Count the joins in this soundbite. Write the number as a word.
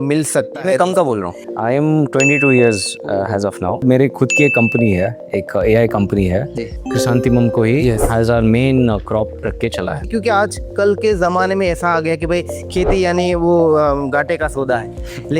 four